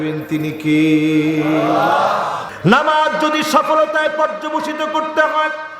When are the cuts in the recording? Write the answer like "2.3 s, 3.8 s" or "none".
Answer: 2.5 s